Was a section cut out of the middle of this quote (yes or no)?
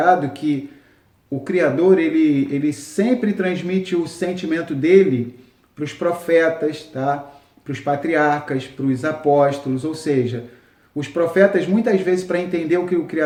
no